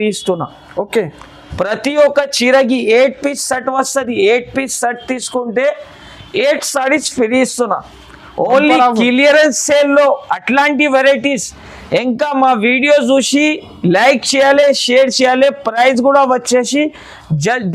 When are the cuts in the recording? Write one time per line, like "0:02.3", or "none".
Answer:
none